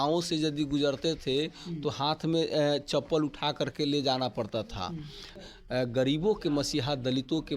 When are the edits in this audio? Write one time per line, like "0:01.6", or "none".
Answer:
0:05.5